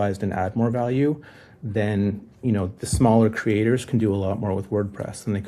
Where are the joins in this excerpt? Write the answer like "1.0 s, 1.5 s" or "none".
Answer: none